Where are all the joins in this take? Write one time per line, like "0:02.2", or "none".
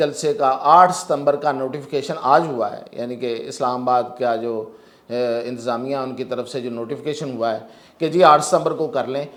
none